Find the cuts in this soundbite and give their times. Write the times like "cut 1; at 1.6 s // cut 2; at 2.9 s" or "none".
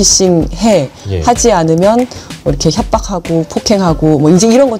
none